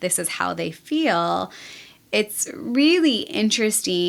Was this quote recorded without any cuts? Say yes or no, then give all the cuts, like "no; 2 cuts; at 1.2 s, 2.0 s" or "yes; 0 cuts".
yes; 0 cuts